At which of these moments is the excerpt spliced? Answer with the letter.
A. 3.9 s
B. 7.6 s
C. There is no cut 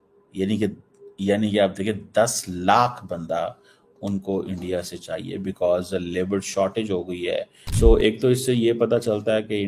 B